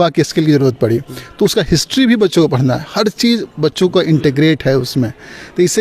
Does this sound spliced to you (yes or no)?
no